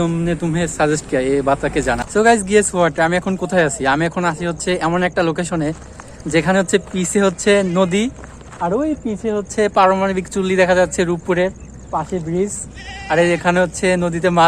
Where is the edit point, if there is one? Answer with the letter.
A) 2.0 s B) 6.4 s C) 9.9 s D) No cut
A